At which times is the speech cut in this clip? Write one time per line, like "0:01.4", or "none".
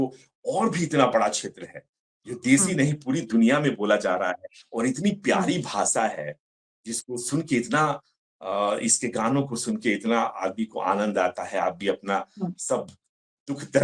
none